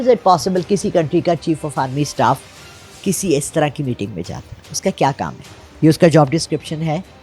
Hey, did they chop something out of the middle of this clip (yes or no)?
no